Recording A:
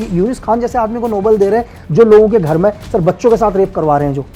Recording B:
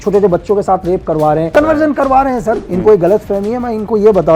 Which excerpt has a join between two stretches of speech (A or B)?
B